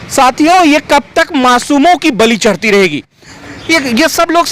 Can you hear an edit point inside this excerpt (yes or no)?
yes